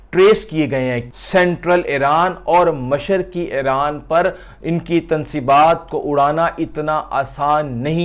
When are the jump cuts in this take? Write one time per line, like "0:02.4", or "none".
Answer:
0:01.0